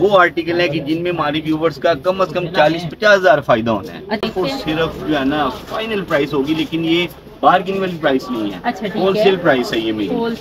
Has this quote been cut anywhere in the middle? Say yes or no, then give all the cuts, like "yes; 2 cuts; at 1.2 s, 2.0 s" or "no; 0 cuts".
yes; 1 cut; at 4.2 s